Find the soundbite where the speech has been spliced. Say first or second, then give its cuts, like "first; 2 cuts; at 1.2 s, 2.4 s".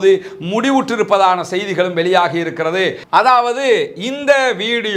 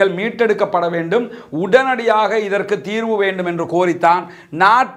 first; 1 cut; at 3.0 s